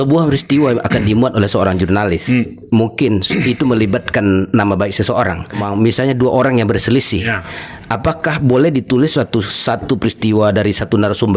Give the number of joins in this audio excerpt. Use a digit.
1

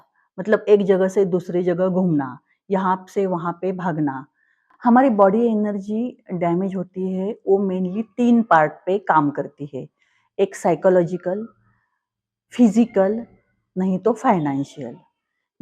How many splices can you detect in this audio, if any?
1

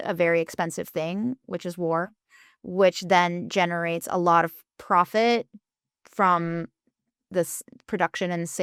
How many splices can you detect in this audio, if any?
0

